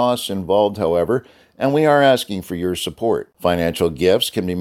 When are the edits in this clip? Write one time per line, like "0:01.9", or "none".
none